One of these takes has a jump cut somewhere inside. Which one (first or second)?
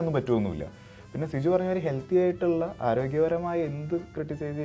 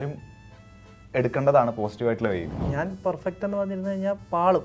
second